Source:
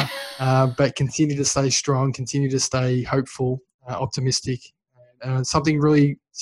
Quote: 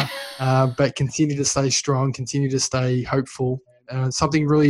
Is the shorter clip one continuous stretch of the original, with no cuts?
no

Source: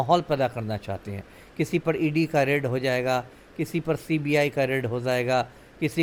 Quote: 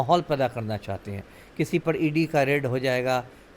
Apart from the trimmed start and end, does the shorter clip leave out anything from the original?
no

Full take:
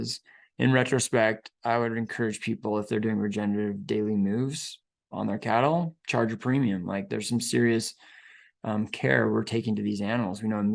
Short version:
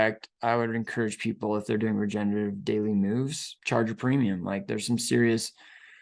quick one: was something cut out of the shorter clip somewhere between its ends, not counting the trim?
yes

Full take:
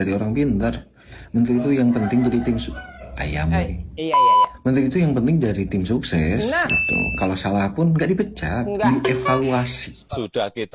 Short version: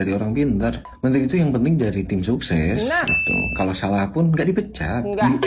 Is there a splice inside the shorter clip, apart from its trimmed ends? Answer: yes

